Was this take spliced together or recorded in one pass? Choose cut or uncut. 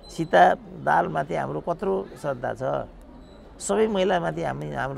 uncut